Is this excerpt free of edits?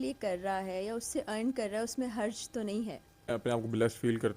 no; 1 cut; at 3.3 s

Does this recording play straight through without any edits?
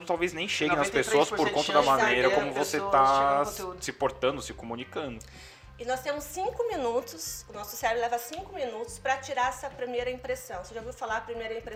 yes; 0 cuts

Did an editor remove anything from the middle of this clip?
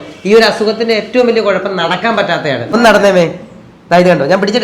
yes; 1 cut; at 2.7 s

